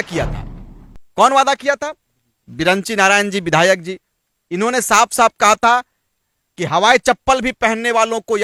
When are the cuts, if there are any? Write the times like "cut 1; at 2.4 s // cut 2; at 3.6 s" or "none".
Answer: none